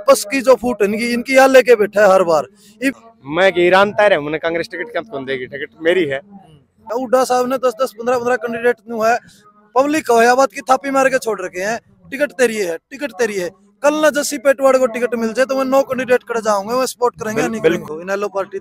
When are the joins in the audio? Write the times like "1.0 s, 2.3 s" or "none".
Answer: 3.0 s, 6.8 s, 17.8 s